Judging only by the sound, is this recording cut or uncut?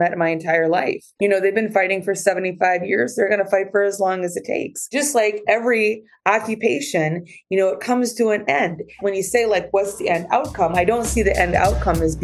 cut